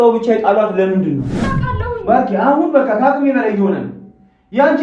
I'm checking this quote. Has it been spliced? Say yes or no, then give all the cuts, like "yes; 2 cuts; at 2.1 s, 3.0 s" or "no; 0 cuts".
yes; 1 cut; at 1.4 s